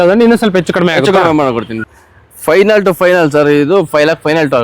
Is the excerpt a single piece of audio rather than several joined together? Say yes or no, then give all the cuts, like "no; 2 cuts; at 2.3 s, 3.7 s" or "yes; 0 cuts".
no; 1 cut; at 1.8 s